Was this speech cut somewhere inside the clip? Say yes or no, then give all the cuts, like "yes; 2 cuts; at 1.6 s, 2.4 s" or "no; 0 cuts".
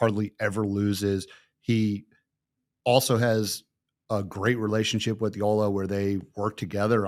no; 0 cuts